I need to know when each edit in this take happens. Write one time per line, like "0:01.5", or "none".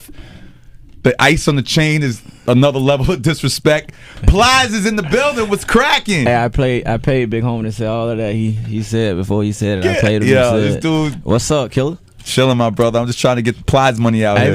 0:06.2